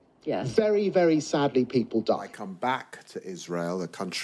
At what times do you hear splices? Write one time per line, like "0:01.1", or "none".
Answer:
0:02.3